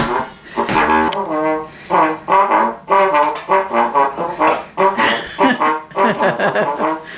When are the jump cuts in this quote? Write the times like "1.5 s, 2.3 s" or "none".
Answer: 1.1 s

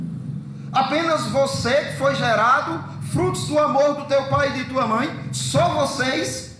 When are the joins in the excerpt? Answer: none

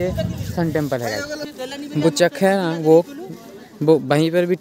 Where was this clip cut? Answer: 1.3 s

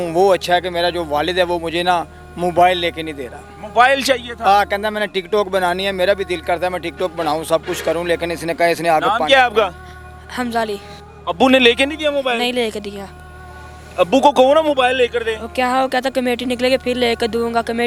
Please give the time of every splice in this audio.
10.9 s

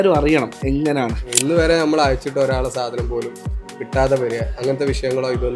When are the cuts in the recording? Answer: 1.3 s

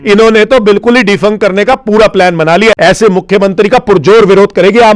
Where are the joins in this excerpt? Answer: 2.8 s

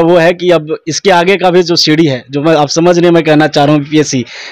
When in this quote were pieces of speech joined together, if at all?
none

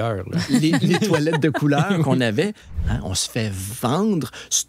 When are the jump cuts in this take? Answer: 2.7 s

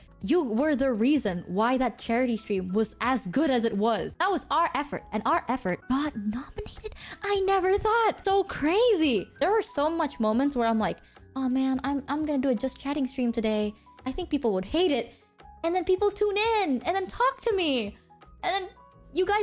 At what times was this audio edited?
4.1 s, 5.8 s, 8.2 s, 9.3 s

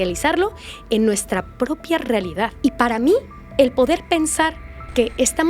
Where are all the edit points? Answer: 2.5 s

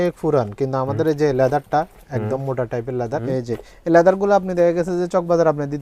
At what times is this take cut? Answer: 3.2 s

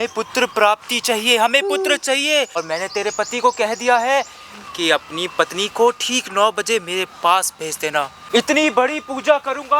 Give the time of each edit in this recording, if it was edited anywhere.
2.6 s, 8.2 s

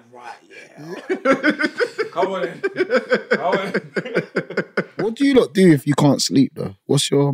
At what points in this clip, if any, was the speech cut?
5.1 s

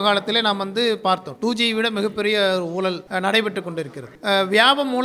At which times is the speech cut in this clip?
3.0 s, 4.0 s

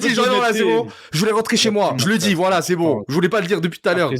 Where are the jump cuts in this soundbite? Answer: 2.0 s

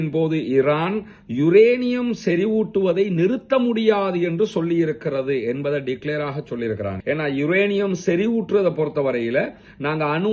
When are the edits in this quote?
none

